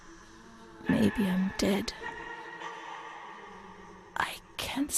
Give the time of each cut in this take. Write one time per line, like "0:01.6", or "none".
0:02.0
0:04.0